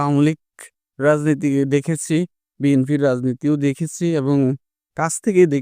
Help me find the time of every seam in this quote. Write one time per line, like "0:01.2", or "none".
none